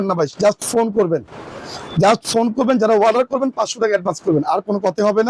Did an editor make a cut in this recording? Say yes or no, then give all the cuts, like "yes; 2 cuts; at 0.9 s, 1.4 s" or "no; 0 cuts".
no; 0 cuts